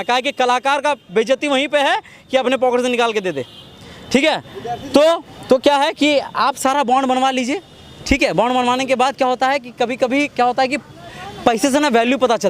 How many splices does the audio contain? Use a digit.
0